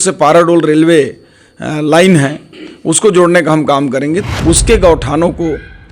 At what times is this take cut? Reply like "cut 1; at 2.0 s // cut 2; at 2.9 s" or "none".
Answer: cut 1; at 4.2 s